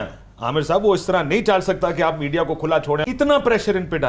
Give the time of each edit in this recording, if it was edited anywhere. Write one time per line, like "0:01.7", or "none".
0:03.0